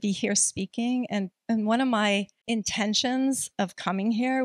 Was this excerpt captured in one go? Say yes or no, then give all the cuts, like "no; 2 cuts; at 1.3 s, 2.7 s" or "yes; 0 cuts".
no; 1 cut; at 2.4 s